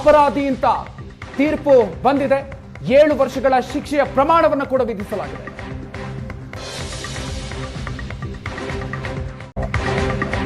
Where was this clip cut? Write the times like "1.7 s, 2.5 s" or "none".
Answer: 9.5 s